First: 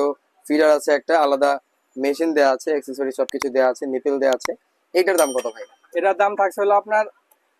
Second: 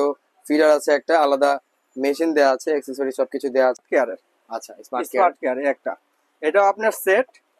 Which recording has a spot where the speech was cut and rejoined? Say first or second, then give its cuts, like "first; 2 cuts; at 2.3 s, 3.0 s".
second; 1 cut; at 3.8 s